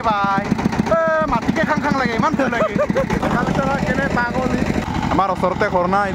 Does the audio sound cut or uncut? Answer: cut